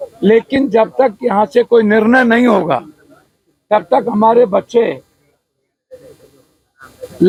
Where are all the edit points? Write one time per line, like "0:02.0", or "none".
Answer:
none